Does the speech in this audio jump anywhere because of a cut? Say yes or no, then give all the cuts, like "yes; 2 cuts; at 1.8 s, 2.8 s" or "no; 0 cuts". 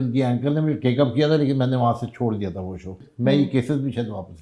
yes; 1 cut; at 3.1 s